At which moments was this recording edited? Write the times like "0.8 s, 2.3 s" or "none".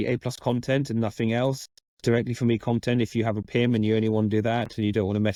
none